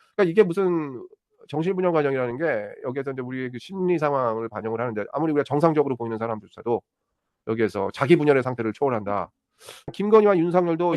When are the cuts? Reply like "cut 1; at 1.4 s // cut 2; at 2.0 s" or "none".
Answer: cut 1; at 9.9 s

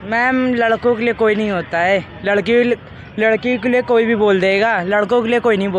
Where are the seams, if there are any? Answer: none

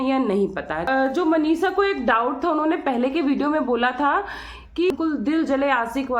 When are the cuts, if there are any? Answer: cut 1; at 0.9 s // cut 2; at 4.9 s

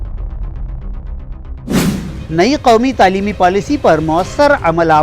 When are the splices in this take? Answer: cut 1; at 2.1 s

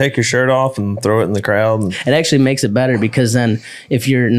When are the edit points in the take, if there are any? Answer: cut 1; at 1.9 s

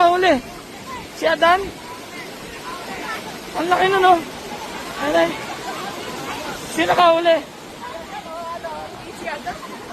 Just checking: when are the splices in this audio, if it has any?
none

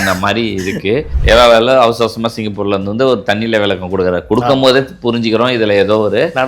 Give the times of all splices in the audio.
cut 1; at 1.1 s

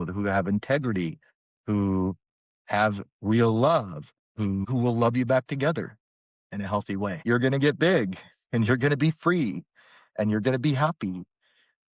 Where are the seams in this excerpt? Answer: cut 1; at 4.6 s // cut 2; at 7.2 s

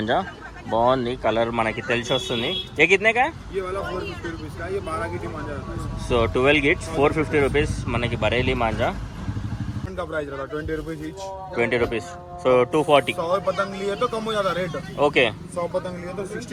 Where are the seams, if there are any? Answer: cut 1; at 9.9 s

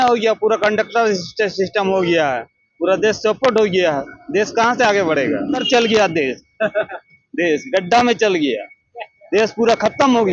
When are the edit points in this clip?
cut 1; at 5.6 s

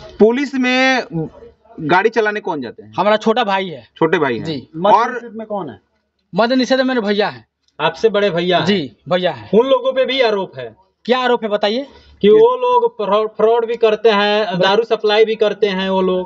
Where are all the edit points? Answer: none

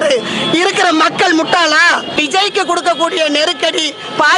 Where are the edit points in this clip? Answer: cut 1; at 2.1 s

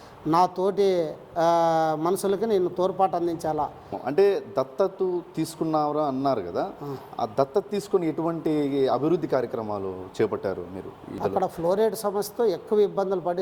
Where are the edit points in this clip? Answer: cut 1; at 4.0 s // cut 2; at 11.2 s

